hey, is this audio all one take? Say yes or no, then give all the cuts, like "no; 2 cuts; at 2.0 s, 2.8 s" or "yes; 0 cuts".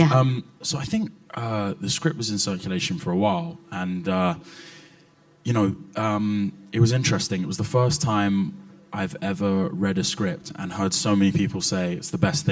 no; 1 cut; at 4.8 s